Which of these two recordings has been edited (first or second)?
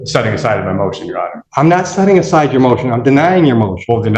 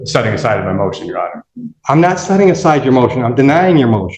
first